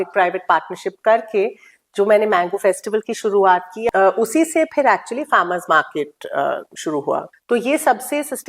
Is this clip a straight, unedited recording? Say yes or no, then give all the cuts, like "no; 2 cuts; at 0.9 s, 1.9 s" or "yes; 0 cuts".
no; 2 cuts; at 3.9 s, 7.3 s